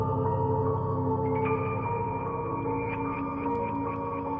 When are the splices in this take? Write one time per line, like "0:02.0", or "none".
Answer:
none

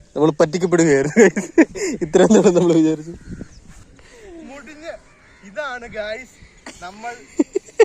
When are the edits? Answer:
0:03.9

